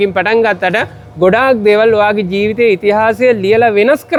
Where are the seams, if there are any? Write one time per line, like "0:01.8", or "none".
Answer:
none